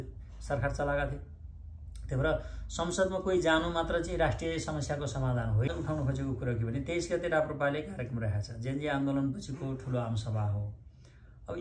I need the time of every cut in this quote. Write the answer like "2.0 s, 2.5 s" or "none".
5.7 s